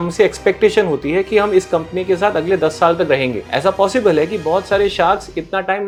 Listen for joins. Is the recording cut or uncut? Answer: uncut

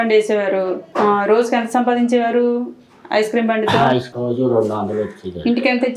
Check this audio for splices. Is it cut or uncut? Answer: cut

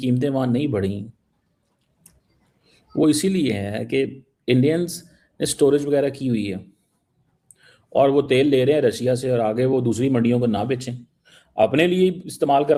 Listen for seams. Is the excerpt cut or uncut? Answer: uncut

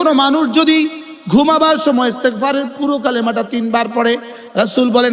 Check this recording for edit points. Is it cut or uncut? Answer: uncut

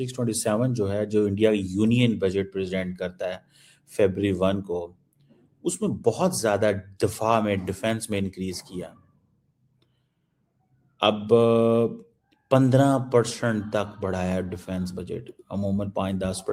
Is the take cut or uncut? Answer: uncut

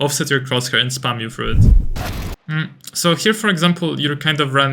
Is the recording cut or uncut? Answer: cut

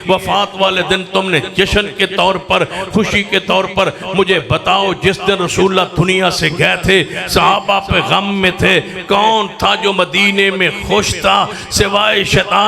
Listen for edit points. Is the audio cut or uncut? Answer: uncut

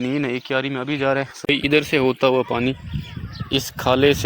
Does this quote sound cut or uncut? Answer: cut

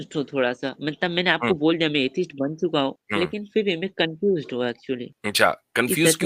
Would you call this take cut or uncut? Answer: cut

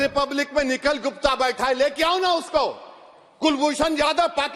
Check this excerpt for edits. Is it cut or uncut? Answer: uncut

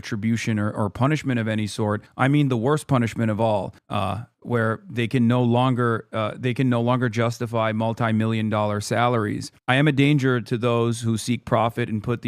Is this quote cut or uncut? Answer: cut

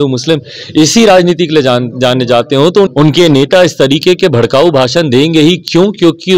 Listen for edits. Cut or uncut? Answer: cut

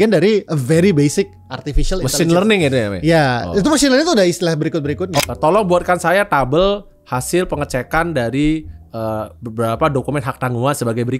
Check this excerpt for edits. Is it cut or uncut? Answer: cut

